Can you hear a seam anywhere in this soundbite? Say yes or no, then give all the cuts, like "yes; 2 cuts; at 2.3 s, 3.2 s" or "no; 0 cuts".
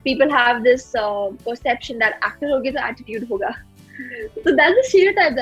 no; 0 cuts